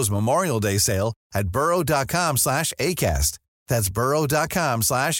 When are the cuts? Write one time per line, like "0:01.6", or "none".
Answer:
none